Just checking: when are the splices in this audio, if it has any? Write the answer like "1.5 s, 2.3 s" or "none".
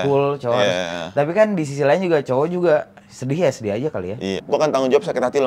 4.3 s